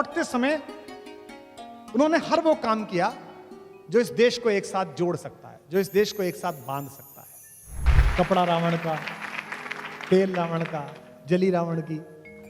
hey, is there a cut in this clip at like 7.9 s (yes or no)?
yes